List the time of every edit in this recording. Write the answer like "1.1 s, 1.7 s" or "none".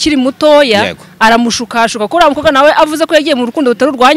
none

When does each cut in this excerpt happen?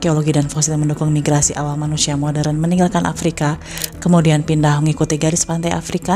none

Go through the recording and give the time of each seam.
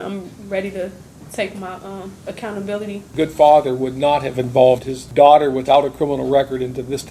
2.2 s, 3.0 s, 5.0 s

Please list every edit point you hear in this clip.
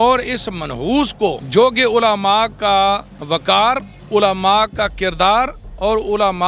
none

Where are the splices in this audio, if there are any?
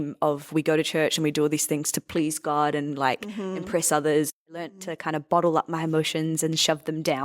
4.7 s

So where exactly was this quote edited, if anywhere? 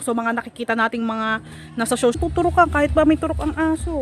2.2 s

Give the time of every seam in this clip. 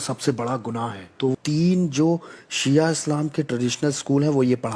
1.3 s

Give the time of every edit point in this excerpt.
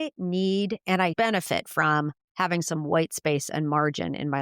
1.1 s

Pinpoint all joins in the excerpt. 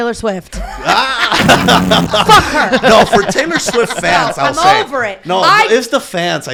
none

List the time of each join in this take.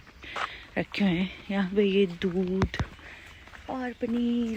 none

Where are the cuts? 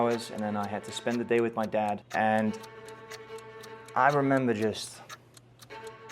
2.0 s

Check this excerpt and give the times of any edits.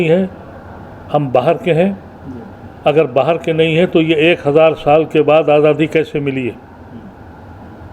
none

